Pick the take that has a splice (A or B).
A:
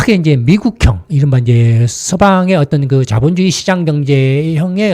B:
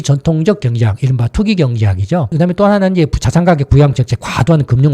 B